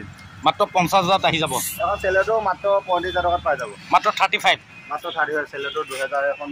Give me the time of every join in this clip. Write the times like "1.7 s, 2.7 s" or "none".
1.6 s